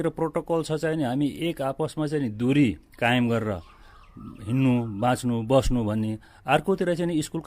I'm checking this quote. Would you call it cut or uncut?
uncut